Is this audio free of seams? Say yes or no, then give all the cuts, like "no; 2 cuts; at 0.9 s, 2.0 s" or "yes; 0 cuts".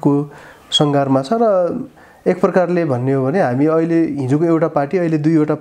yes; 0 cuts